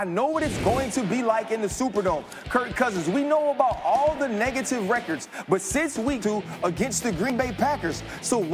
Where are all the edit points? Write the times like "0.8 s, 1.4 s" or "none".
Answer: 6.2 s